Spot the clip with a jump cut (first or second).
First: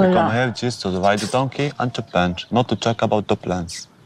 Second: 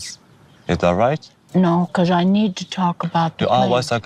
second